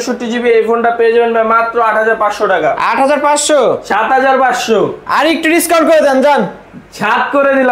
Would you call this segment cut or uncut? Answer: uncut